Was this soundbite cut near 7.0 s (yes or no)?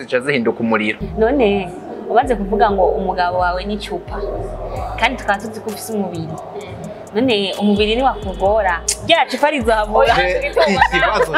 no